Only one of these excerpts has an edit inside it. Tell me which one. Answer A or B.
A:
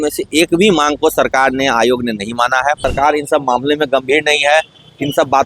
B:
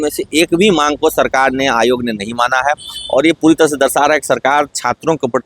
A